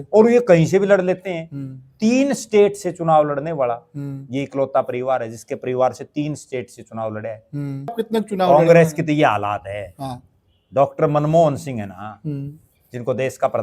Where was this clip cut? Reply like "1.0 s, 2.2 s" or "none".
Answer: 8.0 s